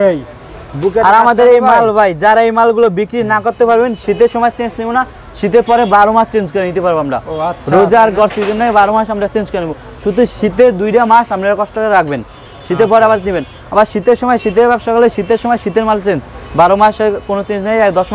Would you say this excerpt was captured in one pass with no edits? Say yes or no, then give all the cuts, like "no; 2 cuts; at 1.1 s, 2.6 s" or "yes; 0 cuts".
yes; 0 cuts